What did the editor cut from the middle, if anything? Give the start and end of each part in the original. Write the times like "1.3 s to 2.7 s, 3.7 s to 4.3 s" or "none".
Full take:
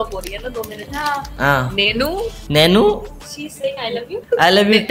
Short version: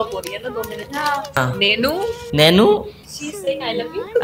1.4 s to 1.5 s